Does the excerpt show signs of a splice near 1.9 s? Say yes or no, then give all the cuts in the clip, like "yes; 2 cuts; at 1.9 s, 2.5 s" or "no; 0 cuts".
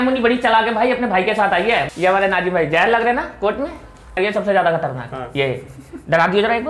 yes; 2 cuts; at 1.9 s, 4.1 s